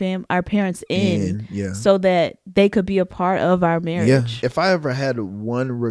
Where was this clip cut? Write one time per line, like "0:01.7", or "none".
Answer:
0:04.3